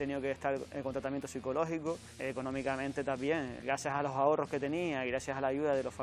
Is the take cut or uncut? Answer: uncut